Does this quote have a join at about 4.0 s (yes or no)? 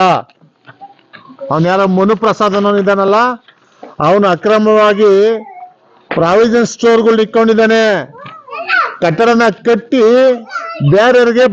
no